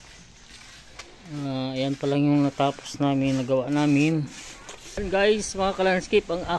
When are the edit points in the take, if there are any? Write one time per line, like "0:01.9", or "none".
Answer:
0:05.0